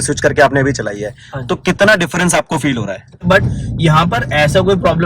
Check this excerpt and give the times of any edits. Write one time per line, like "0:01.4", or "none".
0:03.2